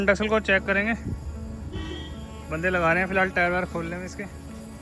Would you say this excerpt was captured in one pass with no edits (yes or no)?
yes